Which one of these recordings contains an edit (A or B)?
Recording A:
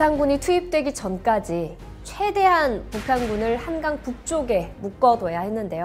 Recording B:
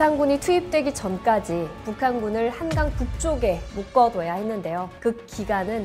B